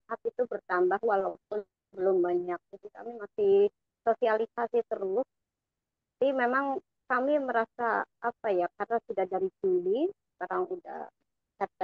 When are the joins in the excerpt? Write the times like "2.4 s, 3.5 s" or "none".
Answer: none